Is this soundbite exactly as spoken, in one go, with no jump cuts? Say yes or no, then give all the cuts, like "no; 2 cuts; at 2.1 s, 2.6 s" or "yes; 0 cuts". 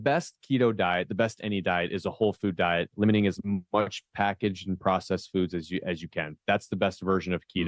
yes; 0 cuts